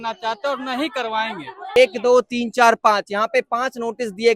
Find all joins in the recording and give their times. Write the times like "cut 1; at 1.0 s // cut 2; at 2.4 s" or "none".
cut 1; at 1.8 s